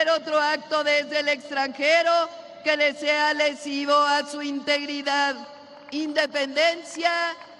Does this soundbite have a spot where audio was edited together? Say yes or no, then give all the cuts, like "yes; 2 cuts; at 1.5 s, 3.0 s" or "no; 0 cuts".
no; 0 cuts